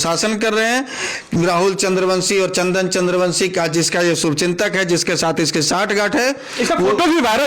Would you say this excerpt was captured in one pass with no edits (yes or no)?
yes